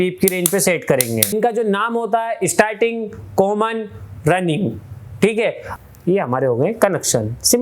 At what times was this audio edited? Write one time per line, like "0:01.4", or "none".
0:01.3
0:05.7